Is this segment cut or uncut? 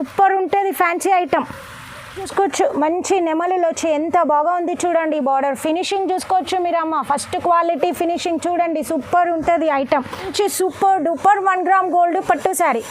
cut